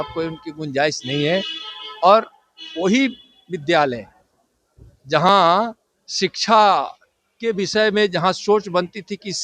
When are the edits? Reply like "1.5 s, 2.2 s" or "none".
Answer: none